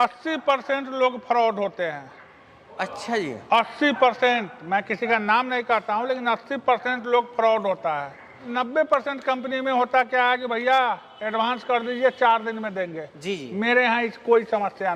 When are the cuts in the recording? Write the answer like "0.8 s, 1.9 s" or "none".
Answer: 8.4 s